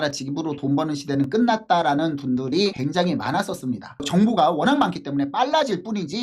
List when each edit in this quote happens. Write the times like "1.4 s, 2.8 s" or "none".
3.9 s